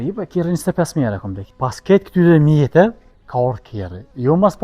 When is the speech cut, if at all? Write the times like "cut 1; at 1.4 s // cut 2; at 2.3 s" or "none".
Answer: cut 1; at 1.4 s